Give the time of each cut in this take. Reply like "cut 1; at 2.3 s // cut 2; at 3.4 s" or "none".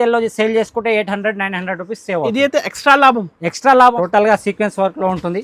cut 1; at 4.0 s